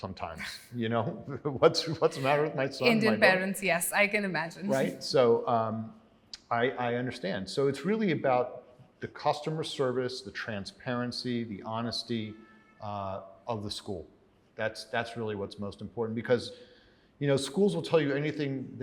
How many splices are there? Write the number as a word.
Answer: zero